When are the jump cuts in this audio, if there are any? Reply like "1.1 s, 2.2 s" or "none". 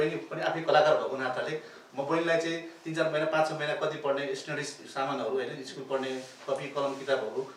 none